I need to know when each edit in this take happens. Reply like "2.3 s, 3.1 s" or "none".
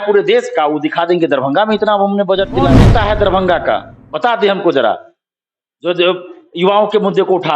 2.8 s